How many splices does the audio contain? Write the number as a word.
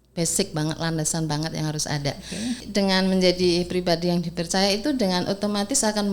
one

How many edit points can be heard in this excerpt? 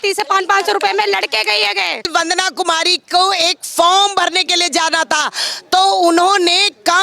one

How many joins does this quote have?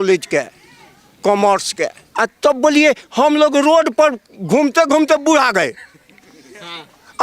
one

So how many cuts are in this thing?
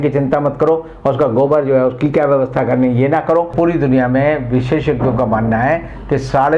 one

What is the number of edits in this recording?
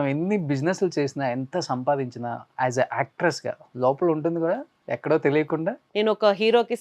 two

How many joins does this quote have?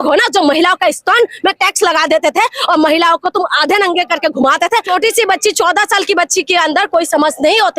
one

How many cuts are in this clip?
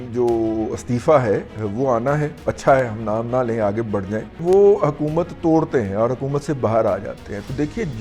two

